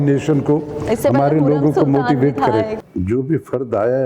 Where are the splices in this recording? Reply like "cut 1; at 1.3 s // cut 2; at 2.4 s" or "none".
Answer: cut 1; at 2.8 s